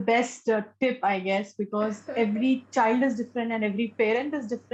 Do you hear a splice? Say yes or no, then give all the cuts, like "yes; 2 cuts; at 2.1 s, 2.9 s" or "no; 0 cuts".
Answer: no; 0 cuts